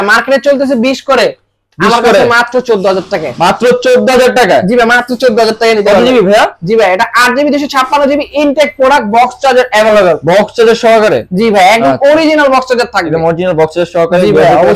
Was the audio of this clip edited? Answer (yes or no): no